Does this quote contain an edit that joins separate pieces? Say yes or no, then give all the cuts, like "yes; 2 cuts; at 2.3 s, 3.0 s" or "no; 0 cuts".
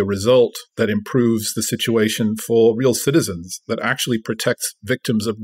no; 0 cuts